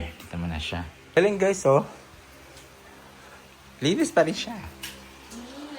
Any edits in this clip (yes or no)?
yes